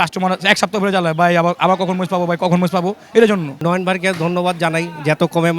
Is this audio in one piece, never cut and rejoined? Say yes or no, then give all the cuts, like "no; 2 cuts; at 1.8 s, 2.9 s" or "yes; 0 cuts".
no; 1 cut; at 3.5 s